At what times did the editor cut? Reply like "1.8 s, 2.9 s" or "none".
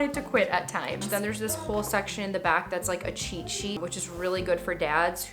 1.0 s, 3.8 s